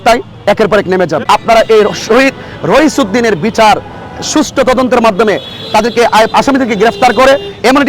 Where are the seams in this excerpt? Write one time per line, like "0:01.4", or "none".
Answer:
0:01.2